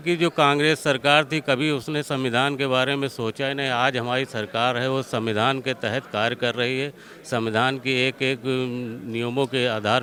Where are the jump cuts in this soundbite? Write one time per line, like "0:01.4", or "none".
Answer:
none